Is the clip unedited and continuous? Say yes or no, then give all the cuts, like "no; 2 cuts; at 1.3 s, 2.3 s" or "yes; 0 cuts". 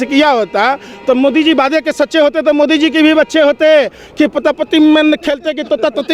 yes; 0 cuts